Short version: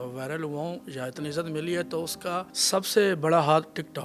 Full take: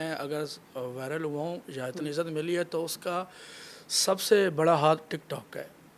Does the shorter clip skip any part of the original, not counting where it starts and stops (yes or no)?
yes